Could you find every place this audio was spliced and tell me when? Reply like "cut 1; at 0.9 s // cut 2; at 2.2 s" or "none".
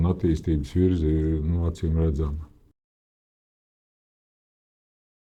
none